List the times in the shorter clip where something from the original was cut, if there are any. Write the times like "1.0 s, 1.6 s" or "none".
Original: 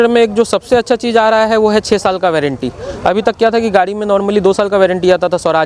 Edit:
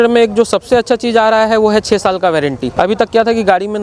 2.6 s